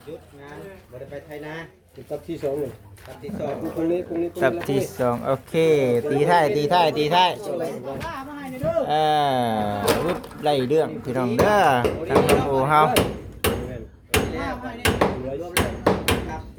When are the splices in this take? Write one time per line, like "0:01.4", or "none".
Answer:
none